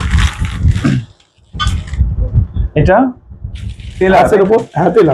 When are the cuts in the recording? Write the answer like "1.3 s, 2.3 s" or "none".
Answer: none